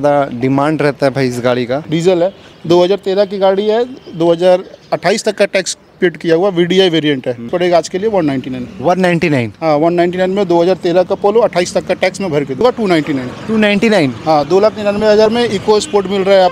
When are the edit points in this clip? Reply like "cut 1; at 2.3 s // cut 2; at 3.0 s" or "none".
cut 1; at 7.5 s // cut 2; at 12.6 s